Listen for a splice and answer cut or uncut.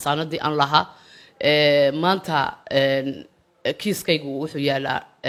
uncut